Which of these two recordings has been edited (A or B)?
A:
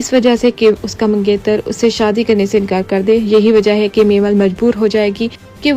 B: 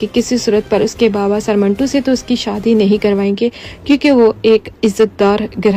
A